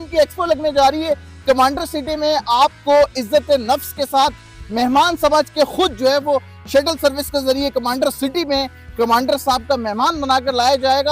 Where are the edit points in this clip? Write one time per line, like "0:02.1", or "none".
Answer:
none